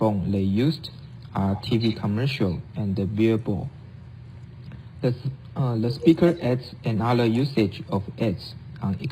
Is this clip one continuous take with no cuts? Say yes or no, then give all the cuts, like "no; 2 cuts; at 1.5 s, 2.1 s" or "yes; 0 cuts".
no; 1 cut; at 4.9 s